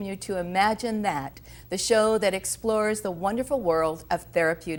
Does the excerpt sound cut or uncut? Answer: uncut